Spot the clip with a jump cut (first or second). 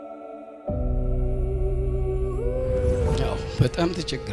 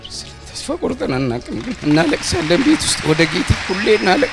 first